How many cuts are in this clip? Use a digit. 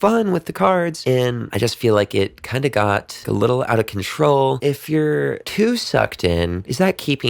3